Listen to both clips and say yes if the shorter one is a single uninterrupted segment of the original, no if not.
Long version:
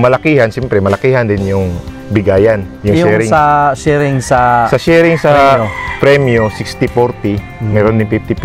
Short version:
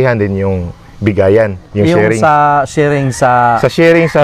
yes